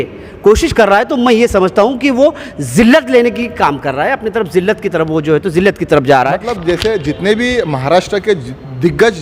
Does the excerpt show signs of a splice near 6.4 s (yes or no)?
yes